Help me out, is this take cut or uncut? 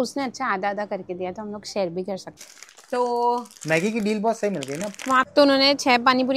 cut